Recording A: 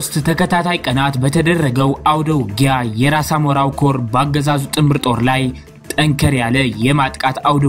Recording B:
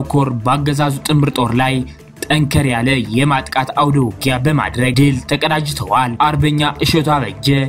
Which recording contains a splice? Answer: B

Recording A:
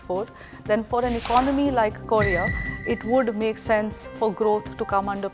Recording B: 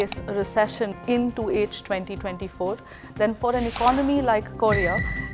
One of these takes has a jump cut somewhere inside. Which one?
B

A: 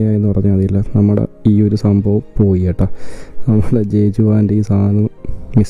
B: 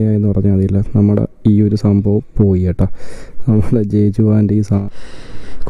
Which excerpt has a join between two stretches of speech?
B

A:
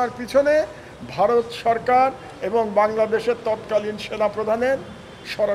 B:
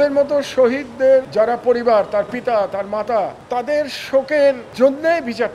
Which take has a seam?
B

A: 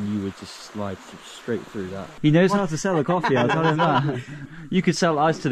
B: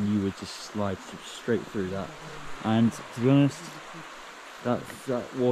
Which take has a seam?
A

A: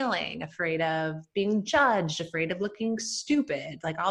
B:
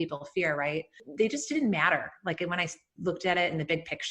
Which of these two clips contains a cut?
B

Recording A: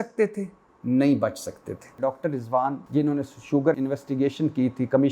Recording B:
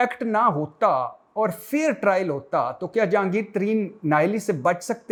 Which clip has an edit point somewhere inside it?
A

